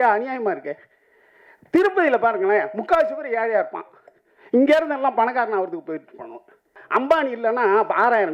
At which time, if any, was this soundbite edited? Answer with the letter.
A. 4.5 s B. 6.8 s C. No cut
B